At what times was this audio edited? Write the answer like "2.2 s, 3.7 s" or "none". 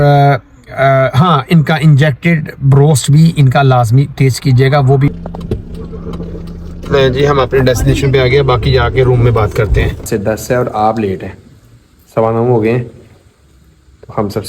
5.1 s, 10.0 s